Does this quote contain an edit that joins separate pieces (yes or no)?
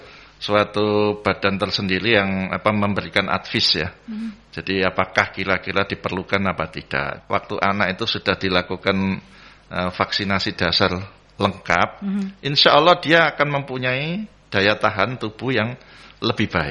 yes